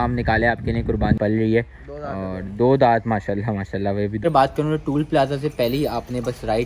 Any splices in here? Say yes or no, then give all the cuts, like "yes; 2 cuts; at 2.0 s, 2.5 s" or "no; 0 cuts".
yes; 2 cuts; at 1.2 s, 4.2 s